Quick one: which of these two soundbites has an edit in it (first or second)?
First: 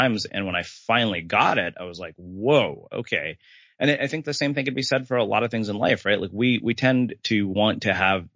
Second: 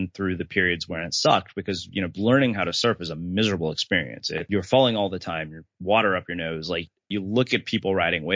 second